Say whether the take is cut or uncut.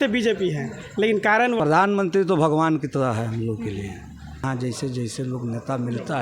cut